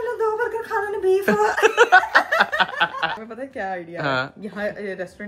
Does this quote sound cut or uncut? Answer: uncut